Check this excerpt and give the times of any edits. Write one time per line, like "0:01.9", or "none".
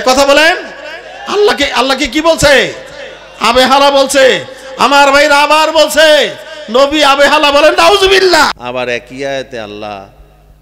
0:08.6